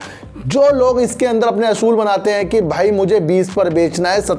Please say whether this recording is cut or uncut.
uncut